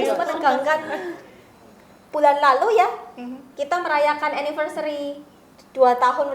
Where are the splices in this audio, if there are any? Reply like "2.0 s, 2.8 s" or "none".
none